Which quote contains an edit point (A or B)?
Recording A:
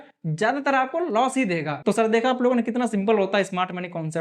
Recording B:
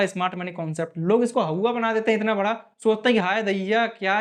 A